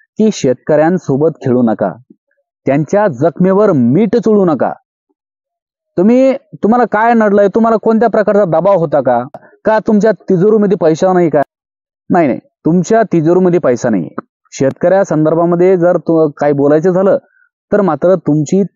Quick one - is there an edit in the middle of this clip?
no; 0 cuts

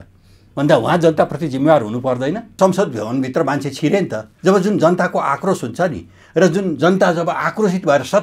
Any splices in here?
yes; 2 cuts; at 2.6 s, 4.2 s

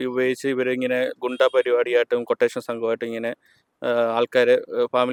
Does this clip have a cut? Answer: no; 0 cuts

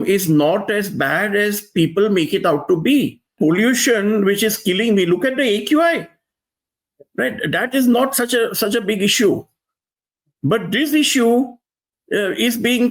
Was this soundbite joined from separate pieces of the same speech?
yes; 1 cut; at 3.3 s

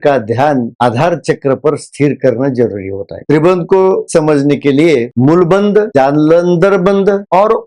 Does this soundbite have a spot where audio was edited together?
yes; 3 cuts; at 3.2 s, 4.1 s, 5.1 s

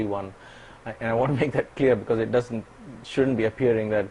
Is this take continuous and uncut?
yes; 0 cuts

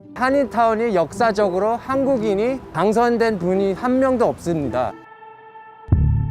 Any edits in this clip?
yes; 1 cut; at 5.1 s

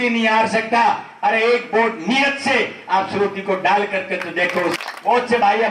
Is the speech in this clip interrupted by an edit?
yes; 1 cut; at 4.8 s

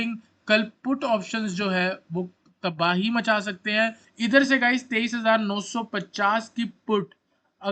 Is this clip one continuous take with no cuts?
no; 1 cut; at 4.0 s

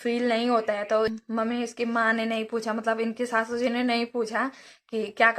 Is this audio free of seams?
no; 1 cut; at 1.2 s

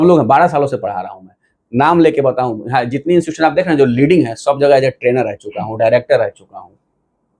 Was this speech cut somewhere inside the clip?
no; 0 cuts

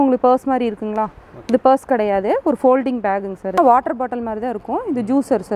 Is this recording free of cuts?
no; 1 cut; at 3.6 s

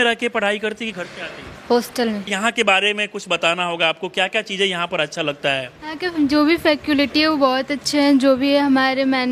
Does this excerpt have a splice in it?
no; 0 cuts

